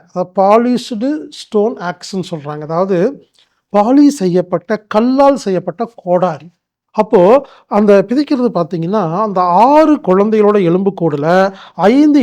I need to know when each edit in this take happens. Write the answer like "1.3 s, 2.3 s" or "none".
6.8 s